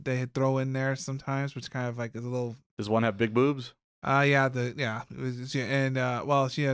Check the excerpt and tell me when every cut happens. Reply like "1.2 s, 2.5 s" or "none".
2.6 s